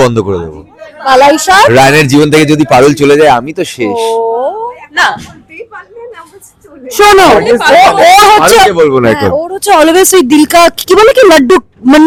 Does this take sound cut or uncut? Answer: uncut